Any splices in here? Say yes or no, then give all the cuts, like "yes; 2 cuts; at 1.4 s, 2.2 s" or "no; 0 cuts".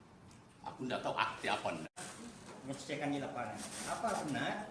yes; 1 cut; at 1.9 s